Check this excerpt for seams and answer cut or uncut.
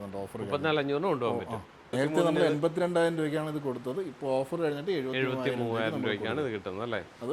cut